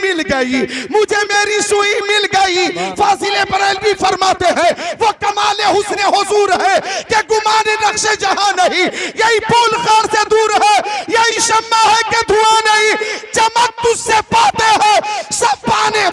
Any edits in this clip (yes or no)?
no